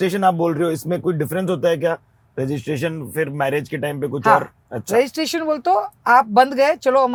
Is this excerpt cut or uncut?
uncut